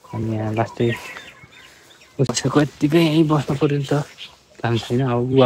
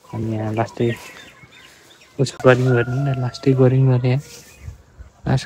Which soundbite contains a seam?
second; 1 cut; at 2.4 s

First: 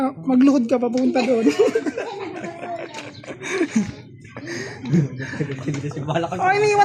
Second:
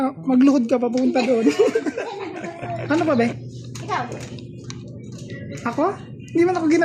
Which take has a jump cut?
second; 1 cut; at 2.8 s

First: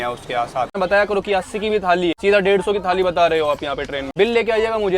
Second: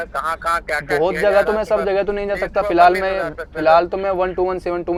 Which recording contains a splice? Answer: first; 3 cuts; at 0.8 s, 2.2 s, 4.0 s

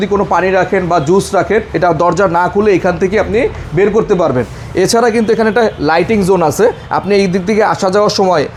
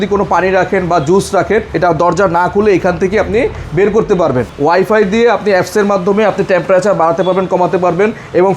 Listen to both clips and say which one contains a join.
second; 1 cut; at 4.5 s

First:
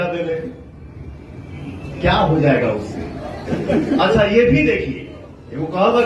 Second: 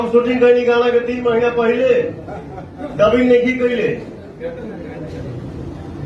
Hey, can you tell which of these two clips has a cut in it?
first; 1 cut; at 3.4 s

